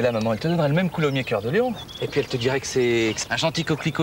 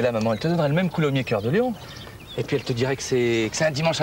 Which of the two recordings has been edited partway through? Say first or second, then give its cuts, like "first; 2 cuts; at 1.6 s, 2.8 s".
first; 2 cuts; at 1.9 s, 3.2 s